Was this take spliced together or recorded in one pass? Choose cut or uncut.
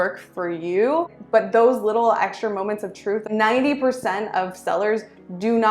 cut